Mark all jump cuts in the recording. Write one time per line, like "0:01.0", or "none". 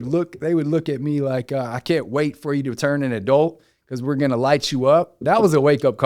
0:05.2